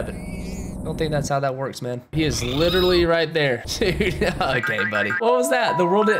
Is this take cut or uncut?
cut